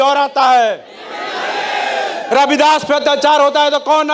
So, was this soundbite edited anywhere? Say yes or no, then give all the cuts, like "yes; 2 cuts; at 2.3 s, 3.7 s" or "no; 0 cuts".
no; 0 cuts